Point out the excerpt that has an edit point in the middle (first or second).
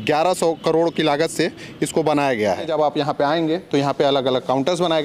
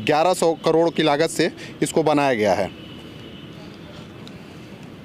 first